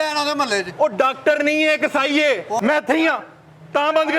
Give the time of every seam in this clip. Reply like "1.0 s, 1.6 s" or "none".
2.6 s